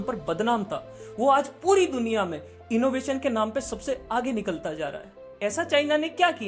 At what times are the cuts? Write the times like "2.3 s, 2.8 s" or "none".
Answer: none